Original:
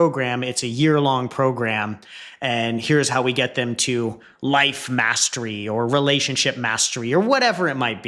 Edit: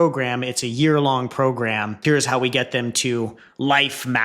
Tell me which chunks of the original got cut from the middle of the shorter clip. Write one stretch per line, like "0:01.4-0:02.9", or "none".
0:02.0-0:02.8